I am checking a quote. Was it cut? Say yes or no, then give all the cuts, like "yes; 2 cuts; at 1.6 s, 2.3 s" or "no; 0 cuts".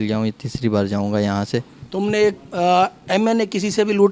yes; 1 cut; at 1.8 s